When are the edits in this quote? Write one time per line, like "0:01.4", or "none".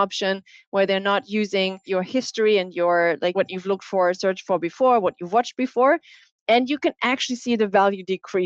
0:01.8
0:03.3